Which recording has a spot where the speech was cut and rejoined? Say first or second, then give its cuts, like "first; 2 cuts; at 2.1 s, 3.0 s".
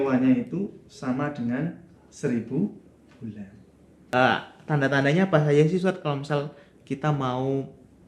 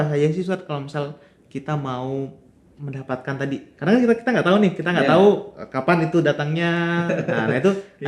first; 1 cut; at 4.1 s